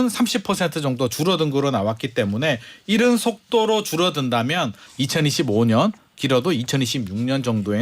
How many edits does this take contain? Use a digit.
1